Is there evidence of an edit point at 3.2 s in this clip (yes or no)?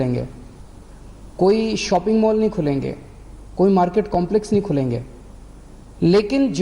no